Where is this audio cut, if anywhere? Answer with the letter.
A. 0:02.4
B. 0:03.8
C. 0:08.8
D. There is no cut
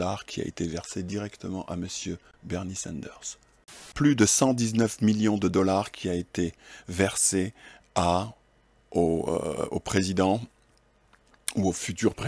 B